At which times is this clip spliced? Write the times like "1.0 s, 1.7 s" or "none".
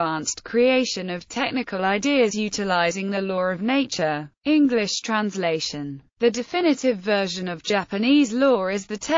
1.7 s